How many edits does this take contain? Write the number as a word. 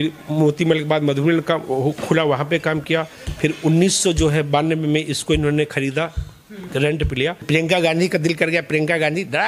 one